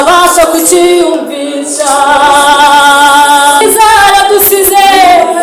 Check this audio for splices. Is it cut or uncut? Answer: cut